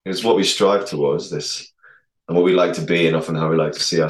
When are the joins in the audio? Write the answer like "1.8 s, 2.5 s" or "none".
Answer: none